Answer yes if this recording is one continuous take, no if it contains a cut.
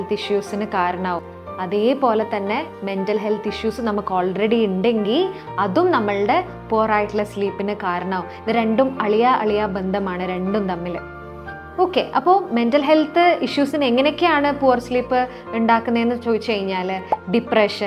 yes